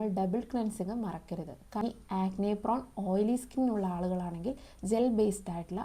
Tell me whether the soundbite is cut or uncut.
cut